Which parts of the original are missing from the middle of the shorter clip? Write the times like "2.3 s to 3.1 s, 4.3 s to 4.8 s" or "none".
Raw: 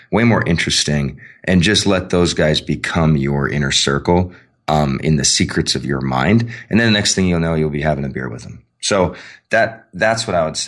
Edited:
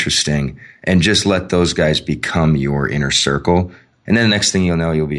4.5 s to 6.6 s